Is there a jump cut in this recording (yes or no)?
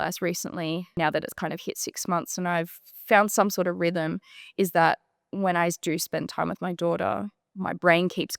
yes